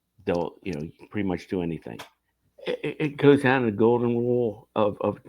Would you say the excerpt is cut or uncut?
cut